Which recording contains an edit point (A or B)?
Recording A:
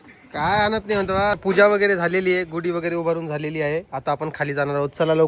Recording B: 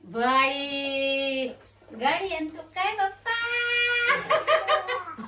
A